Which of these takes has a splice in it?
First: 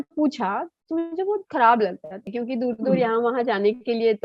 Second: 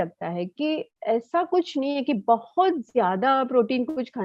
first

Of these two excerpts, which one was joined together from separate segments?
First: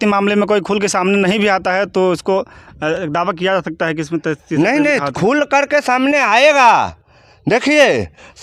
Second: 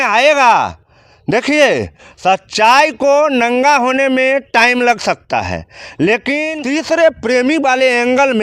second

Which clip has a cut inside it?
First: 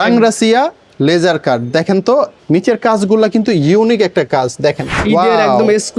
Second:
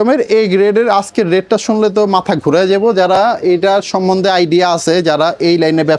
first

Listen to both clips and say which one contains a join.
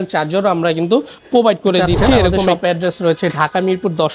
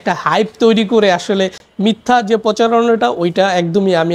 first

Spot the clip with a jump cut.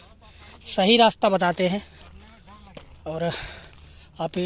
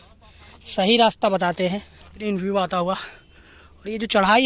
second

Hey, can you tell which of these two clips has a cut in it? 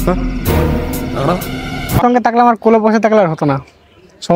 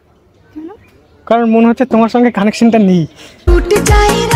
first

